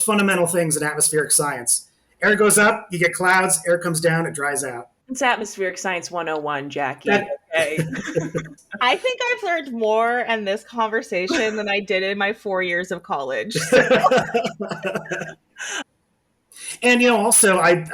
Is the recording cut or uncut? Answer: cut